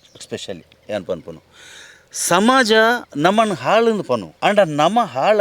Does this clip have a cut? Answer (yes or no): yes